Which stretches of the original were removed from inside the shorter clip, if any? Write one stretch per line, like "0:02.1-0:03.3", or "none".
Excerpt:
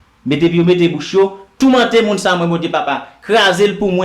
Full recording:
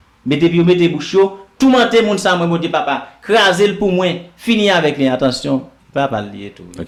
none